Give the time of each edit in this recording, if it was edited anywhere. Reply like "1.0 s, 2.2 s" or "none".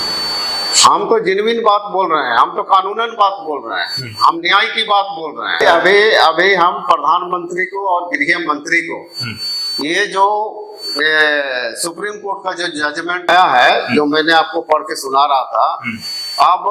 5.5 s, 13.3 s